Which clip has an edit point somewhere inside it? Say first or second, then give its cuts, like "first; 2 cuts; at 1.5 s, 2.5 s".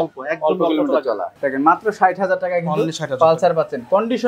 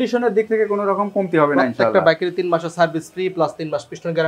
first; 1 cut; at 1.3 s